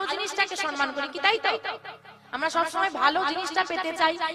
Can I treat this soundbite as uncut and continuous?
yes; 0 cuts

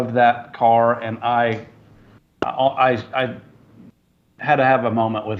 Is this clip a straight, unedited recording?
yes; 0 cuts

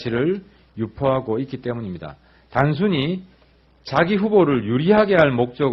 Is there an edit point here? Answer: yes; 1 cut; at 3.4 s

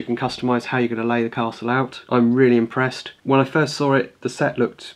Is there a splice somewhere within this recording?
yes; 2 cuts; at 2.0 s, 3.1 s

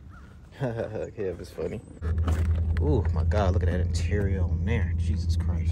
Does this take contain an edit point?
yes; 1 cut; at 2.0 s

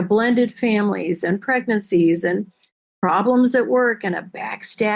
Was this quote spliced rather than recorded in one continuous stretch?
no; 0 cuts

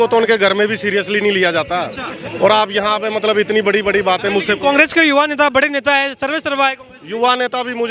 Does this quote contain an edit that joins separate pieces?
no; 0 cuts

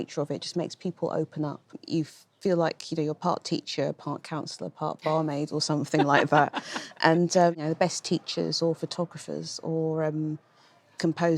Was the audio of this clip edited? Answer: yes; 2 cuts; at 1.8 s, 7.6 s

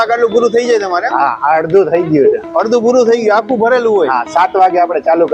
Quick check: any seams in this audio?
no; 0 cuts

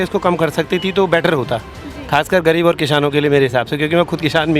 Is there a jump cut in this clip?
no; 0 cuts

